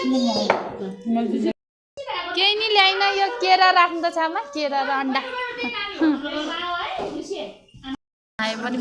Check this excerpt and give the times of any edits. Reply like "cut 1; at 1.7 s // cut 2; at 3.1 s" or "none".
cut 1; at 1.5 s // cut 2; at 8.0 s